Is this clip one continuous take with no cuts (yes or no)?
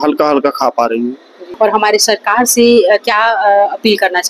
no